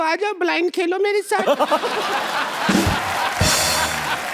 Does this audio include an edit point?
no; 0 cuts

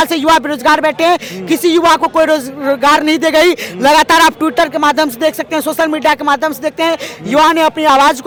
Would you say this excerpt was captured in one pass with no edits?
yes; 0 cuts

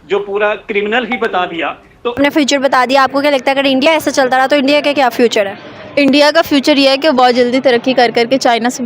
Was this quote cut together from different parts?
yes; 1 cut; at 2.1 s

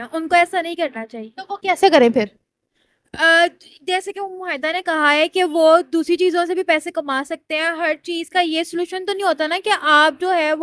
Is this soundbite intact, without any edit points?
yes; 0 cuts

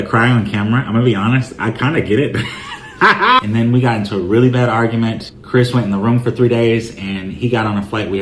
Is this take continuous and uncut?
no; 1 cut; at 3.4 s

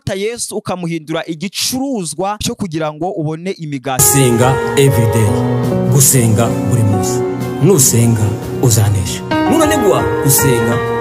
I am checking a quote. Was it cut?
yes; 1 cut; at 4.0 s

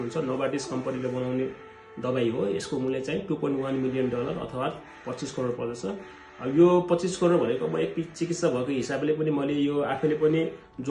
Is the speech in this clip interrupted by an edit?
no; 0 cuts

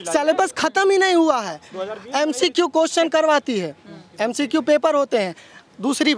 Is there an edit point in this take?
no; 0 cuts

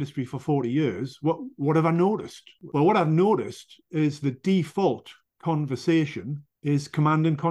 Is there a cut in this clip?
no; 0 cuts

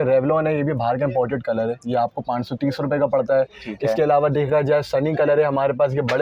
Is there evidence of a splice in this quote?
no; 0 cuts

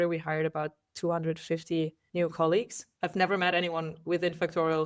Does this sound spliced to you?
yes; 2 cuts; at 2.0 s, 2.8 s

